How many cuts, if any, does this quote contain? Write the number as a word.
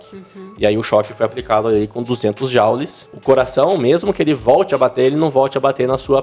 one